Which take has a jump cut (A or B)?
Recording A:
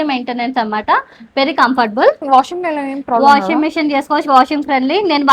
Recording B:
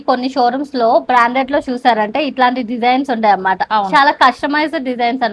A